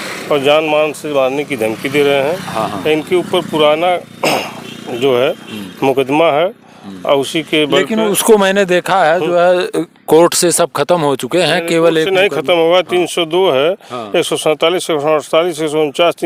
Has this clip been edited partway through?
no; 0 cuts

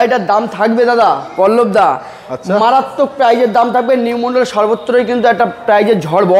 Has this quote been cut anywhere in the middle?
no; 0 cuts

